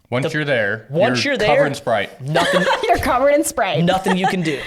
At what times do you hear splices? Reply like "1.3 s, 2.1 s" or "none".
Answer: none